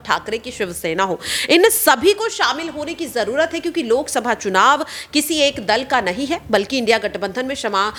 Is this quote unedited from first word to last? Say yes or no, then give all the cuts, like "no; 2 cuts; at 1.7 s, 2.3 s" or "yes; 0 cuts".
yes; 0 cuts